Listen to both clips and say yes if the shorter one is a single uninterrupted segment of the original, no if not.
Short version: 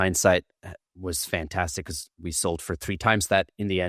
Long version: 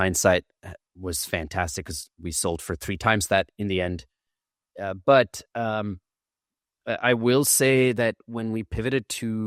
yes